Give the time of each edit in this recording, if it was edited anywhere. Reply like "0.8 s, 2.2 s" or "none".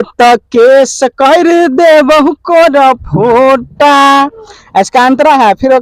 none